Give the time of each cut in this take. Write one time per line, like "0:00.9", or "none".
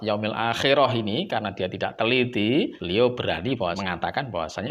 0:02.8
0:03.8